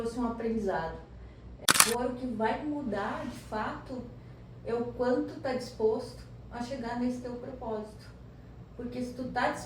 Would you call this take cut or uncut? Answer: cut